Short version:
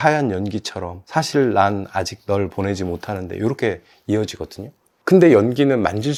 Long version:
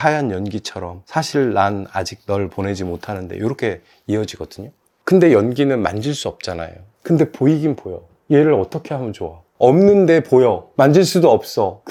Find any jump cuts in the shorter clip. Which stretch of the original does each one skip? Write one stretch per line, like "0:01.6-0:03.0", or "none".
none